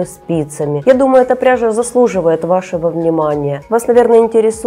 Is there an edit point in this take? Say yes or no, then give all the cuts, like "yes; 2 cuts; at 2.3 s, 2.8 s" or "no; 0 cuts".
yes; 2 cuts; at 0.8 s, 3.6 s